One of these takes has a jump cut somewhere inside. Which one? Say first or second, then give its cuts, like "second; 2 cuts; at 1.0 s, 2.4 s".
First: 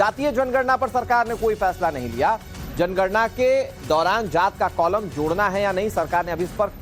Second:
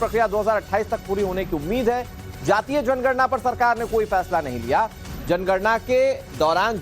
second; 1 cut; at 0.9 s